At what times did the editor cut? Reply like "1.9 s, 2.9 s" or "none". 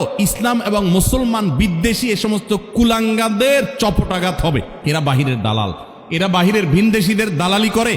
4.7 s